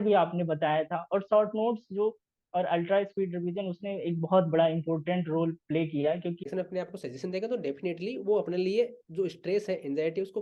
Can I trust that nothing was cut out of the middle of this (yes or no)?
no